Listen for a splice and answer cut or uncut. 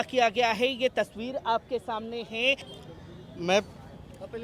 cut